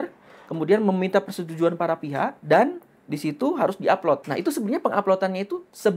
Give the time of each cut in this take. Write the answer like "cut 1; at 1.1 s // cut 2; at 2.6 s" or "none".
cut 1; at 2.4 s // cut 2; at 4.3 s

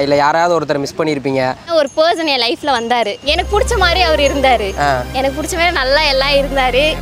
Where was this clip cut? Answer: cut 1; at 1.6 s

